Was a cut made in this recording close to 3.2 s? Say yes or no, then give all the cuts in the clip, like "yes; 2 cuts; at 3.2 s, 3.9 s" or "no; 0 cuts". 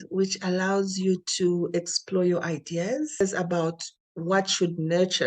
yes; 1 cut; at 3.2 s